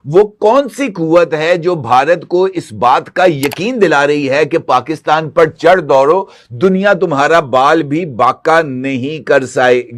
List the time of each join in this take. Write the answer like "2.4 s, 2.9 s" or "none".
none